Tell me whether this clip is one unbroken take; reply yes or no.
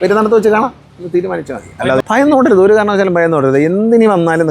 no